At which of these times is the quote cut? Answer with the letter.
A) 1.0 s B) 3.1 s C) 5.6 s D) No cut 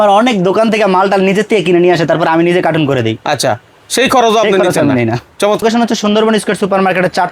C